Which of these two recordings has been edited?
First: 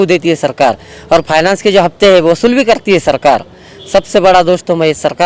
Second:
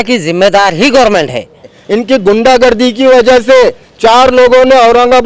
second; 1 cut; at 1.8 s

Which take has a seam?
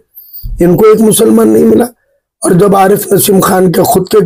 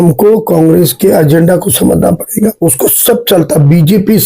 second; 1 cut; at 2.6 s

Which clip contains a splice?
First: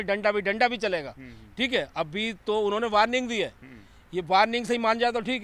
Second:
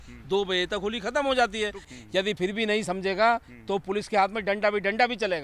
second; 1 cut; at 1.8 s

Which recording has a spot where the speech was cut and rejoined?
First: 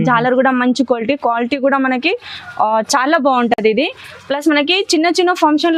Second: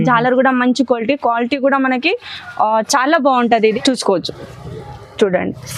second; 1 cut; at 3.7 s

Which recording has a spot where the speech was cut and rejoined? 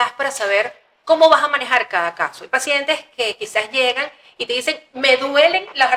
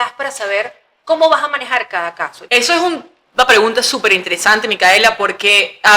second; 1 cut; at 2.3 s

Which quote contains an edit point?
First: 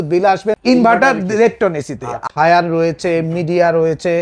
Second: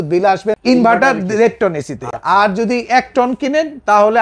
first; 1 cut; at 2.3 s

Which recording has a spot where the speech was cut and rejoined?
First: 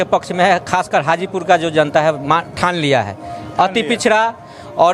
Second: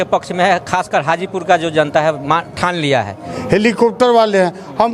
second; 1 cut; at 3.3 s

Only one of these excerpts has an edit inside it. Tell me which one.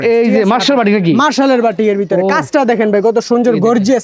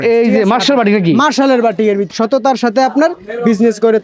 second; 1 cut; at 2.0 s

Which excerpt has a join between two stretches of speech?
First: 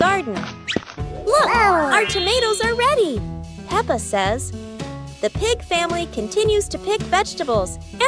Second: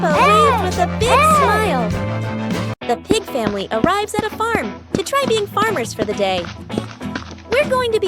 second; 1 cut; at 2.7 s

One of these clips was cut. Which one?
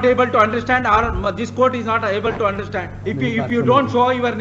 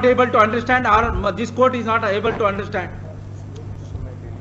first; 1 cut; at 2.9 s

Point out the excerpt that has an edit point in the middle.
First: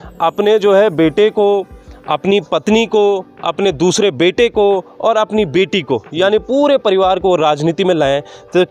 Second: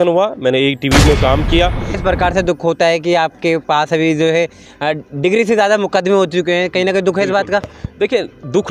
second; 1 cut; at 2.0 s

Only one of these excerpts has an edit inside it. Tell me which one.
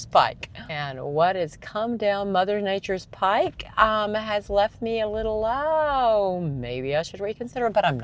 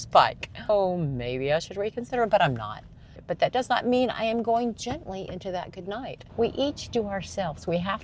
second; 3 cuts; at 0.7 s, 3.2 s, 6.2 s

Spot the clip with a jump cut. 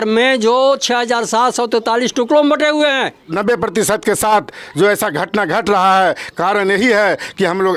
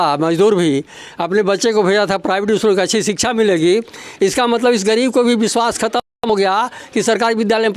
first; 1 cut; at 3.3 s

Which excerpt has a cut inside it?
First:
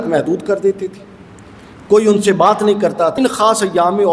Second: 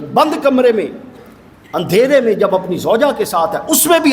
first; 1 cut; at 3.1 s

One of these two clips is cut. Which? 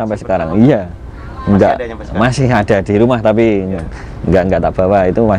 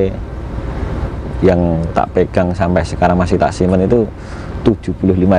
second; 1 cut; at 1.1 s

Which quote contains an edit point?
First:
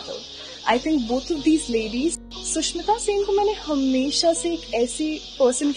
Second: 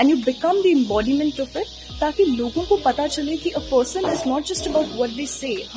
first; 1 cut; at 2.2 s

